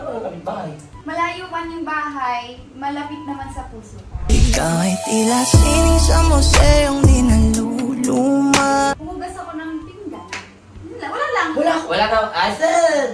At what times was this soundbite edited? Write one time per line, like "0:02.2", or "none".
0:00.9
0:09.0
0:11.8

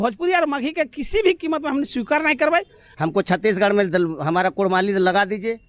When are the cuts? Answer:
0:02.8

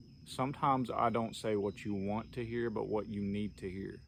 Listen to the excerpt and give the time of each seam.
none

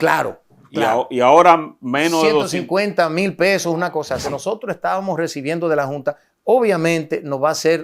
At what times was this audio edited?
0:04.3

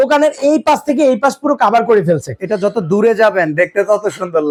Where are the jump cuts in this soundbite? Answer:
none

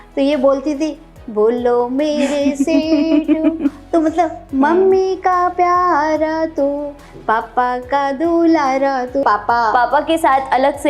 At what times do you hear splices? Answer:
0:09.2

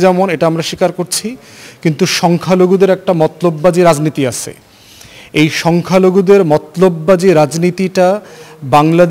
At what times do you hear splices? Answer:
none

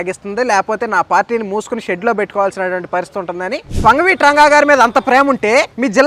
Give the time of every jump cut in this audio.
0:03.8

